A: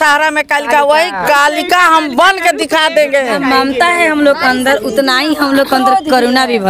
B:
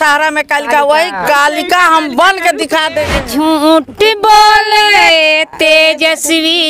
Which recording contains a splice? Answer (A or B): B